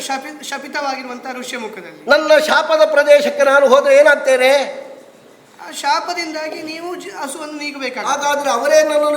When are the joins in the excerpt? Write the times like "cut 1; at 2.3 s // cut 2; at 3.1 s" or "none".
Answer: none